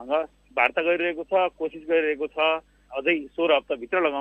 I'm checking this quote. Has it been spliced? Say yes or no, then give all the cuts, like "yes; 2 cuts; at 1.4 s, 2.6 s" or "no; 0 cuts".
no; 0 cuts